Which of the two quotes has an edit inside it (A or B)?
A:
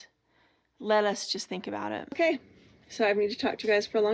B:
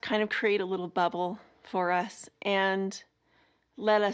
A